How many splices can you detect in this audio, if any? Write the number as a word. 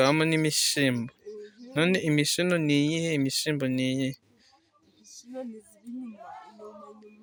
zero